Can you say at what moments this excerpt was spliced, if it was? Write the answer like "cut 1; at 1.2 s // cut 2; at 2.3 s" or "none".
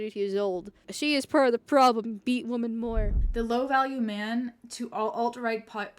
cut 1; at 0.9 s // cut 2; at 3.2 s